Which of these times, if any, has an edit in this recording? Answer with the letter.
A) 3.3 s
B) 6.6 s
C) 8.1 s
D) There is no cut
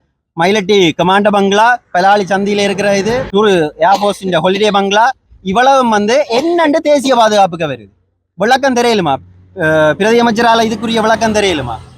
A